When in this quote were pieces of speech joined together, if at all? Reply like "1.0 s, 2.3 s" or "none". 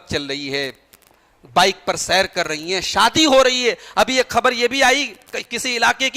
none